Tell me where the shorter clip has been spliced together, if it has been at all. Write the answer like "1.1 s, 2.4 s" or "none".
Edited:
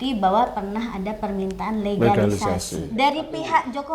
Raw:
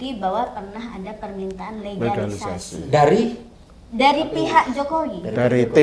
2.7 s